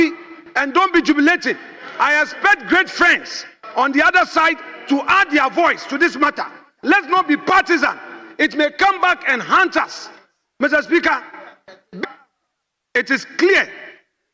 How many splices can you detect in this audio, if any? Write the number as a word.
one